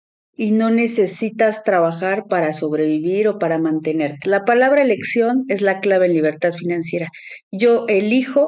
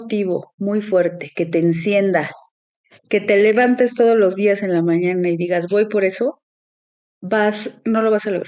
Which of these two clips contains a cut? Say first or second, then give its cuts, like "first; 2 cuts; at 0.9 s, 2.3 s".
first; 1 cut; at 4.2 s